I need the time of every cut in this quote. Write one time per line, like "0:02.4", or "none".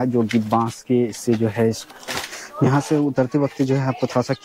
0:01.8